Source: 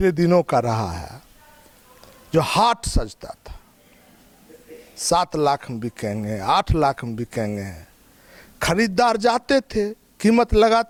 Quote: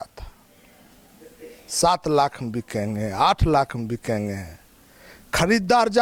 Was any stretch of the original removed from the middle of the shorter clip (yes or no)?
no